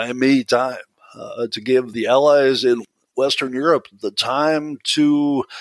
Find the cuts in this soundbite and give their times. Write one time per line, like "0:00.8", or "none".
0:01.9
0:02.8